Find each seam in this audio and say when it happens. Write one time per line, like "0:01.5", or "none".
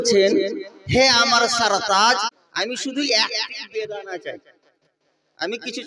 0:02.4